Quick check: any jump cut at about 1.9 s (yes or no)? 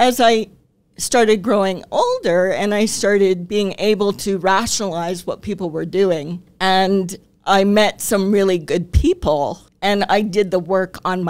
no